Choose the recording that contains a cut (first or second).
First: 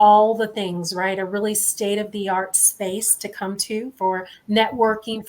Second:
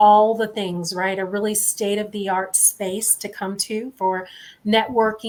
first